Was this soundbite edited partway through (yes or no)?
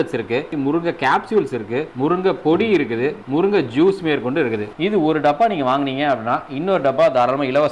yes